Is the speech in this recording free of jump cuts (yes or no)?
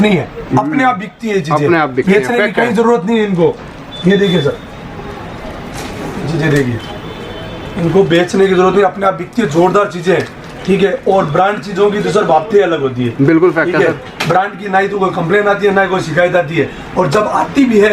yes